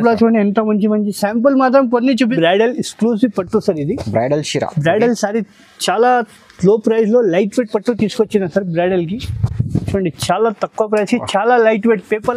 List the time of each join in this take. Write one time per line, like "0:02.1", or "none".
0:02.3